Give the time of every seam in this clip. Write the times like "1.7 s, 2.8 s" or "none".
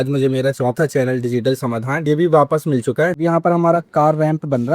3.2 s